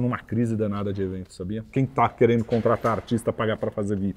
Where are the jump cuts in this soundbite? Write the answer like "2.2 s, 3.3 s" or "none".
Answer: 1.7 s